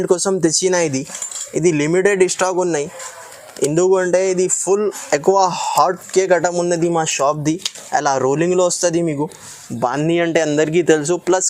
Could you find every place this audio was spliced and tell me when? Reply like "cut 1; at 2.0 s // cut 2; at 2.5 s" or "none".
none